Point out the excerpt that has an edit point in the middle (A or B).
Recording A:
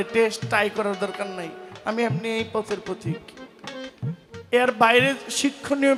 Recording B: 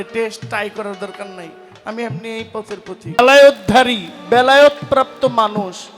B